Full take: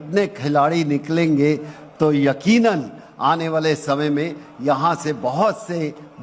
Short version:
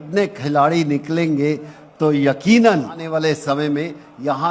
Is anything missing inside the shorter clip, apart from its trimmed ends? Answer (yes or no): yes